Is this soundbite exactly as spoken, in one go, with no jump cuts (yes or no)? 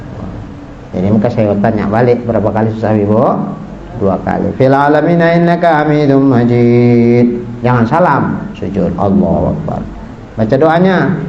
yes